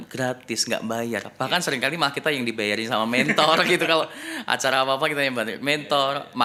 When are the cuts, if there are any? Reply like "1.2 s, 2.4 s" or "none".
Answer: none